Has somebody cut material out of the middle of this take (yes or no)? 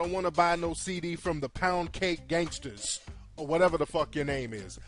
no